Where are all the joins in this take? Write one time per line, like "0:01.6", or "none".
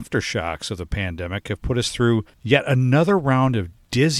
0:02.3